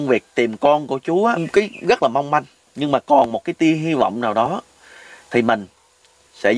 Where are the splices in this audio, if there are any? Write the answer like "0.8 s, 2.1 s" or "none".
1.4 s

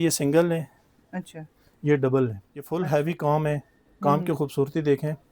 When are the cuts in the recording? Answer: 2.7 s

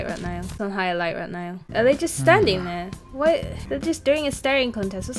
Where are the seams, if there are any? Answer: 1.5 s, 3.6 s

